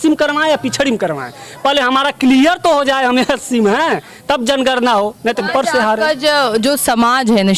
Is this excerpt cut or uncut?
cut